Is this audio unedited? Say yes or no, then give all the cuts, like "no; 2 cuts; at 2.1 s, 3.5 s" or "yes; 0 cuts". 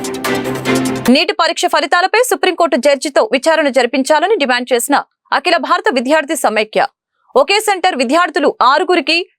no; 1 cut; at 1.0 s